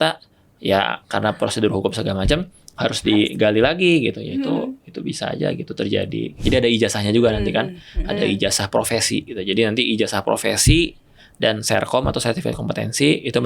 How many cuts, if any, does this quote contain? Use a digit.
1